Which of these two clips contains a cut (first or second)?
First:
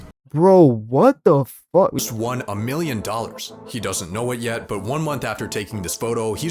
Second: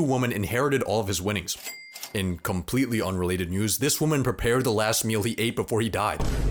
first